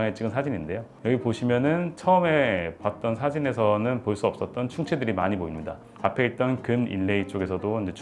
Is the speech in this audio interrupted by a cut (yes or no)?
no